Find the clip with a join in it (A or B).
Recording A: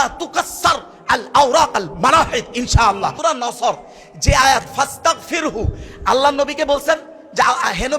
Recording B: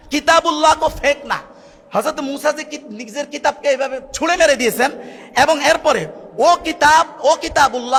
A